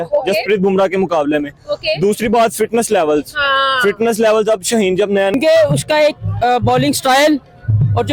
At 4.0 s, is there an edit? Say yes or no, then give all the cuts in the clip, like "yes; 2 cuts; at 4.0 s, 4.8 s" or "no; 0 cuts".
no; 1 cut; at 5.3 s